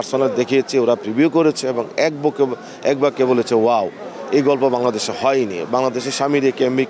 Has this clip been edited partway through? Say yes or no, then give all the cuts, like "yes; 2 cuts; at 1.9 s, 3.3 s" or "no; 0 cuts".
no; 0 cuts